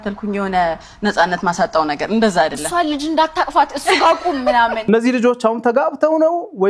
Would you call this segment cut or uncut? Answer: cut